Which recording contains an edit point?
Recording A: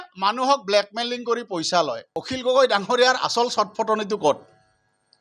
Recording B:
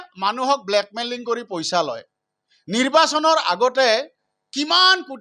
A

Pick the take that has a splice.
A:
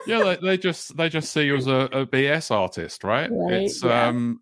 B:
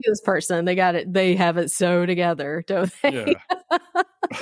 A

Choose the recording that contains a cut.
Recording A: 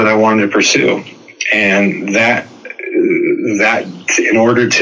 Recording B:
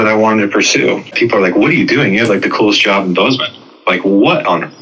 B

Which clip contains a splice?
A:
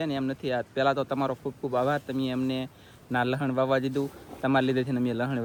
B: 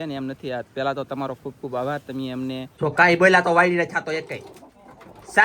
B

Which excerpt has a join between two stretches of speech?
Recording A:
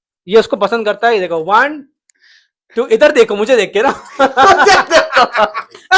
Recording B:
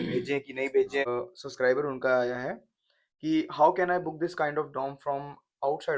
B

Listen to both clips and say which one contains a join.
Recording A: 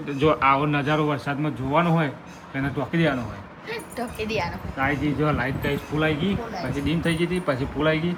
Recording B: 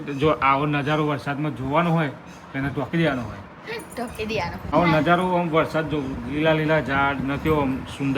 B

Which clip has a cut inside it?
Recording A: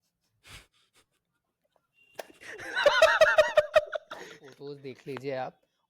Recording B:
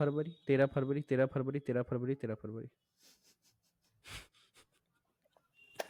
A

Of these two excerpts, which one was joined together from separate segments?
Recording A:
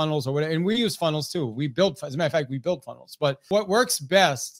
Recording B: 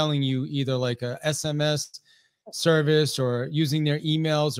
A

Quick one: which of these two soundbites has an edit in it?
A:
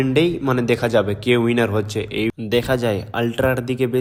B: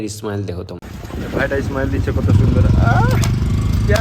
B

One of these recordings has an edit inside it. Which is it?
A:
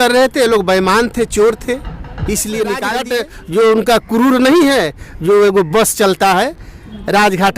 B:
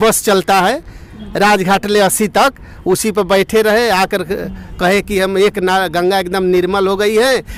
A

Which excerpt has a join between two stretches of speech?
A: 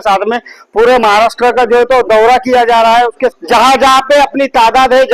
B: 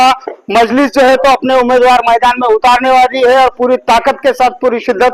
A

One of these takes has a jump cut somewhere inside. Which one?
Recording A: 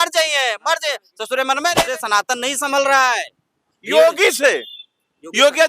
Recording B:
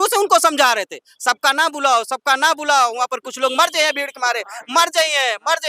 A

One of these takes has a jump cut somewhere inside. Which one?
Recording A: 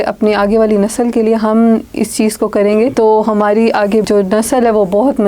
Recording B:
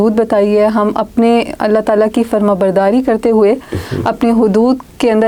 A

